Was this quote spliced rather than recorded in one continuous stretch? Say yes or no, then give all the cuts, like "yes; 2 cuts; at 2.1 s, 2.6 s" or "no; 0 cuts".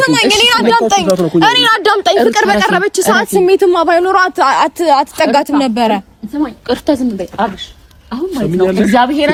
no; 0 cuts